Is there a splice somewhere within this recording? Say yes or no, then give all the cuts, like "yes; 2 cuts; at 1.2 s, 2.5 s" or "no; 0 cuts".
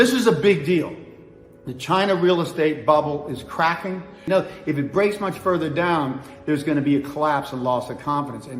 yes; 1 cut; at 4.2 s